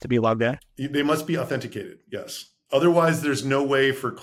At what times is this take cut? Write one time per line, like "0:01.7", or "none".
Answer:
none